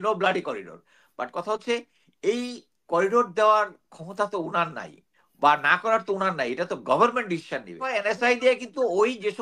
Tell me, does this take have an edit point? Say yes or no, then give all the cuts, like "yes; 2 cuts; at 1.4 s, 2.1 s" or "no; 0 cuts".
yes; 1 cut; at 8.0 s